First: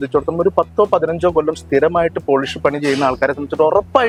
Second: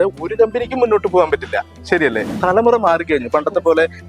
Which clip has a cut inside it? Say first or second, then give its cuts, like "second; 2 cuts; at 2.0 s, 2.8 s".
second; 1 cut; at 2.4 s